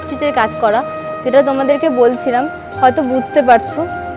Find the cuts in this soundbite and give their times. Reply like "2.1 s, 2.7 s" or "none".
none